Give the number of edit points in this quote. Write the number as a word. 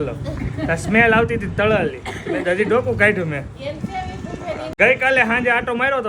one